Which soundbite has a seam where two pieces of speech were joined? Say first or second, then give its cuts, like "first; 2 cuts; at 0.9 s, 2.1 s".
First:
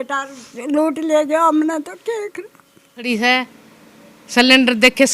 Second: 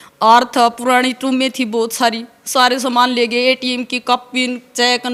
first; 1 cut; at 3.0 s